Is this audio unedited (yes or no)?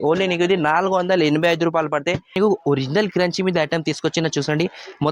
no